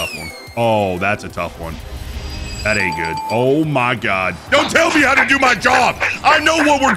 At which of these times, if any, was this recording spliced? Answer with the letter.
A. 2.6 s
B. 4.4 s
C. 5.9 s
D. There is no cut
B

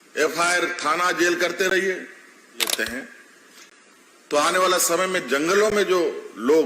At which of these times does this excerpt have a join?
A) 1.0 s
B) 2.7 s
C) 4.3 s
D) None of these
B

